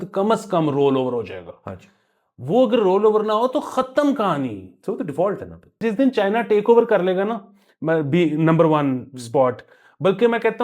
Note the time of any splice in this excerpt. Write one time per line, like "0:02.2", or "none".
0:05.8